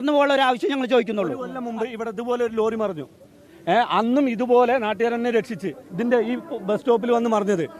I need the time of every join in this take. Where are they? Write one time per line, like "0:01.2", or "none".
0:01.9